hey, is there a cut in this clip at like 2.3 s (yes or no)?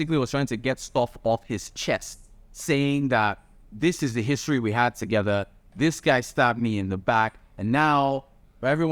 no